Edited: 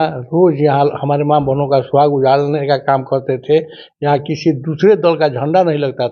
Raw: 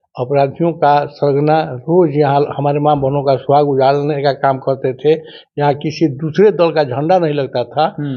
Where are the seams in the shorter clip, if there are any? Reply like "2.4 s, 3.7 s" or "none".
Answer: none